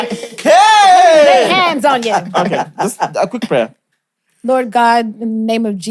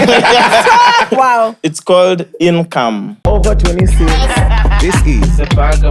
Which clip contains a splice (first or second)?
second